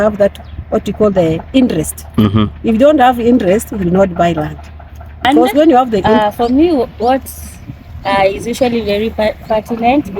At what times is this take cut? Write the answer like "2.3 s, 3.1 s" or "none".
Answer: 6.2 s